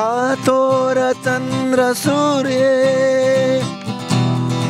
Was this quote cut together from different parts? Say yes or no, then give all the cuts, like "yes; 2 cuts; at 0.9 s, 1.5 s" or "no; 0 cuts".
no; 0 cuts